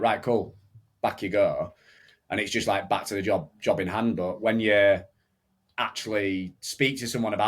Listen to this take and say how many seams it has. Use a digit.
0